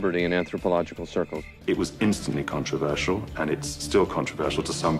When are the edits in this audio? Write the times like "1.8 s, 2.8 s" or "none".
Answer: 1.6 s